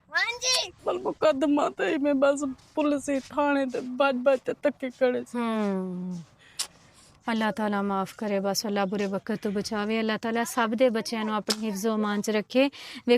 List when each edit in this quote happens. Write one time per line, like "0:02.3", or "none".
none